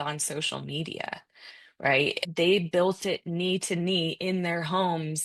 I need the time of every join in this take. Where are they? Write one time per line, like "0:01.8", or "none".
0:02.3